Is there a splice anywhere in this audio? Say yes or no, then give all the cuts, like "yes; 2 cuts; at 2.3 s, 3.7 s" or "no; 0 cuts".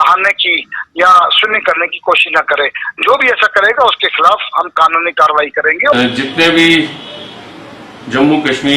yes; 1 cut; at 5.9 s